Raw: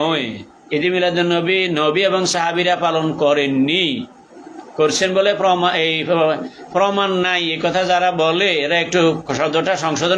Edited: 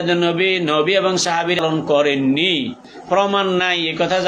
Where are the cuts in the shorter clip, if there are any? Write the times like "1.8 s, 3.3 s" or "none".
1.6 s, 2.9 s